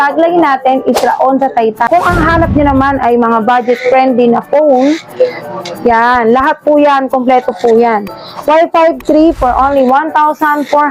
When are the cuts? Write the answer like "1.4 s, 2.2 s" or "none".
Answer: 1.9 s